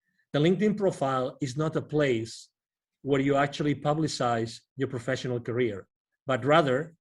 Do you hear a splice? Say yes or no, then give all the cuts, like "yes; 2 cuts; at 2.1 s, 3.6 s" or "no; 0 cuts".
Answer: no; 0 cuts